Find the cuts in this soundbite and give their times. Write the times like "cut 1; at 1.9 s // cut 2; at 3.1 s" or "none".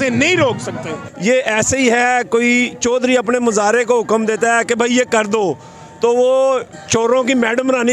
none